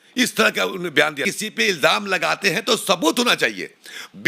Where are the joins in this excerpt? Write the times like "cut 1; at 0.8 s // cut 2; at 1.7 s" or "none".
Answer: cut 1; at 1.2 s

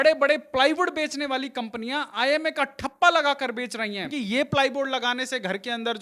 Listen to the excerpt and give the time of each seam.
cut 1; at 4.1 s

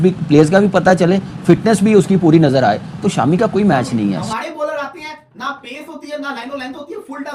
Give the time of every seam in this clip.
cut 1; at 4.2 s

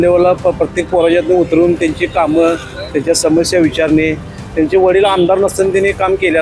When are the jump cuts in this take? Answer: none

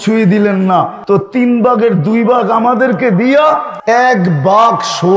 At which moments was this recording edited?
cut 1; at 1.0 s // cut 2; at 3.7 s

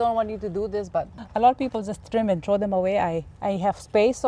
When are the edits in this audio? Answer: cut 1; at 1.2 s

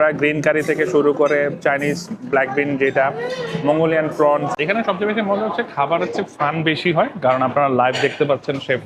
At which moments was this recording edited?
cut 1; at 4.5 s

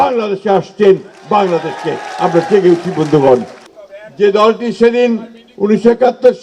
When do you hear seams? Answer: cut 1; at 3.6 s

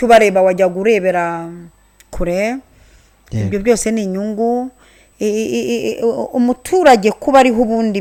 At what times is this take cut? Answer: none

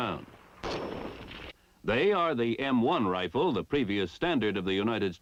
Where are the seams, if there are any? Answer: none

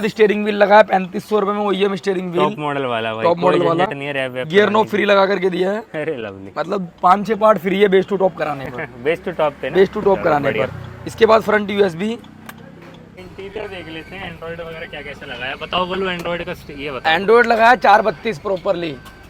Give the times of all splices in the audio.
none

